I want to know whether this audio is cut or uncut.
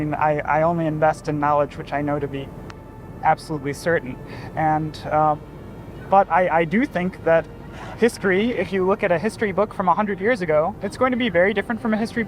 cut